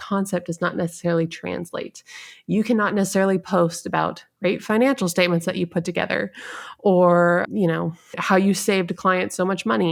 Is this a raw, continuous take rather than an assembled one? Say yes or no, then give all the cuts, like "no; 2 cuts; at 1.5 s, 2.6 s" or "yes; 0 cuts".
yes; 0 cuts